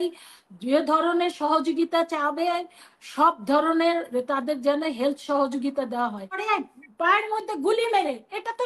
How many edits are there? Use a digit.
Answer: 1